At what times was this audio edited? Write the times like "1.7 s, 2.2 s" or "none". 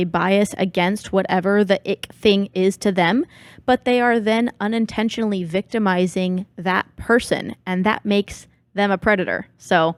none